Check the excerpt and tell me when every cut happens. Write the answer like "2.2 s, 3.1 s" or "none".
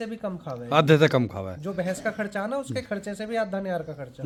none

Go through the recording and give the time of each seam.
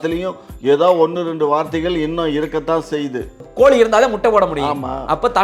3.4 s

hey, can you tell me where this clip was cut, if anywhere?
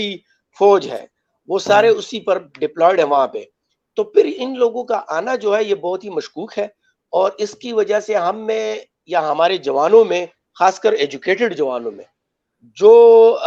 none

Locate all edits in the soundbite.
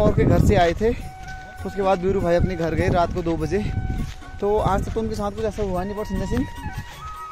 none

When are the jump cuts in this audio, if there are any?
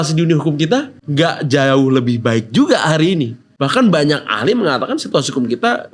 1.0 s, 3.4 s

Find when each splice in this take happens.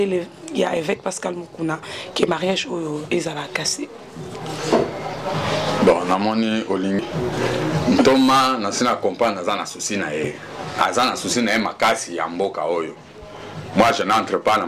none

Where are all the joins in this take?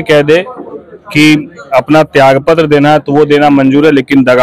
none

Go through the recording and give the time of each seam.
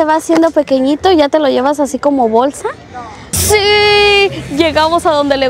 3.4 s

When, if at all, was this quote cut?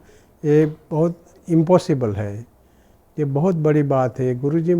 none

